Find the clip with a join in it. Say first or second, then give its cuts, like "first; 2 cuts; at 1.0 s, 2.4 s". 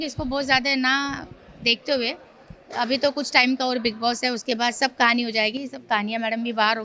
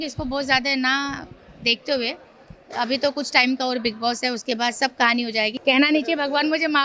second; 1 cut; at 5.5 s